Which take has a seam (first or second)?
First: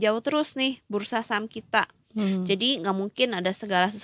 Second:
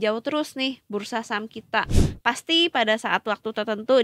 second